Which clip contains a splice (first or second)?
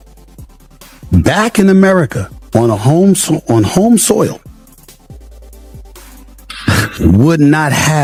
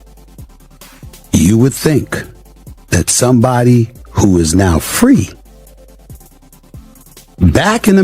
second